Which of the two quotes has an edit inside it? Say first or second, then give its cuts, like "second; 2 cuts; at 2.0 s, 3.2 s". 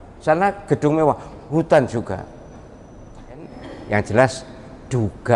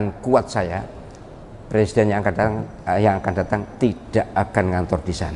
first; 1 cut; at 3.6 s